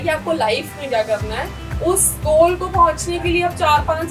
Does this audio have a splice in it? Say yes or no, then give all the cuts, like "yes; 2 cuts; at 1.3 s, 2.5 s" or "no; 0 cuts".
no; 0 cuts